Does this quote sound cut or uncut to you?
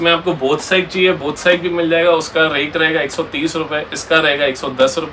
uncut